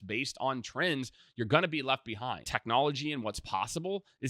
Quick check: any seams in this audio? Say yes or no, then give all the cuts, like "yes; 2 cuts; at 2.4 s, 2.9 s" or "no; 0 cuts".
yes; 1 cut; at 2.5 s